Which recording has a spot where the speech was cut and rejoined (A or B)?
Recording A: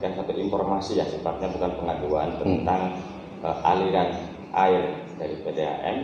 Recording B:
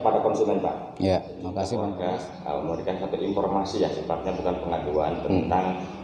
B